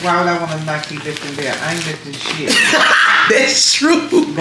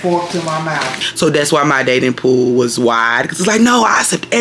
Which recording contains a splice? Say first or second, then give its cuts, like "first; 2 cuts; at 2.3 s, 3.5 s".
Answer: second; 1 cut; at 1.0 s